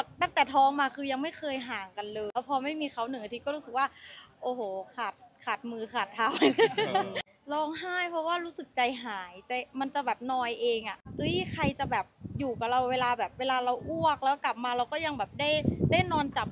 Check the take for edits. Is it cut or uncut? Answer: cut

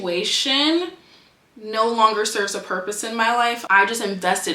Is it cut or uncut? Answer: cut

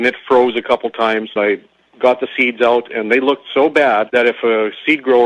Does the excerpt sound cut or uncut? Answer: cut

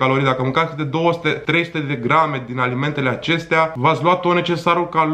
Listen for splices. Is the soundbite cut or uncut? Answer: cut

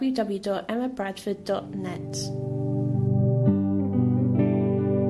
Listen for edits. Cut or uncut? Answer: cut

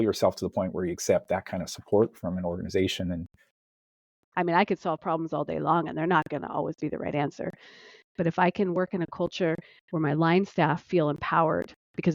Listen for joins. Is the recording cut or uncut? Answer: cut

